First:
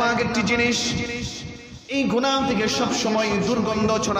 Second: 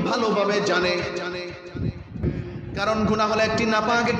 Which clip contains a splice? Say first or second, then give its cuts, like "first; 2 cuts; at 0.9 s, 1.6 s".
second; 1 cut; at 2.2 s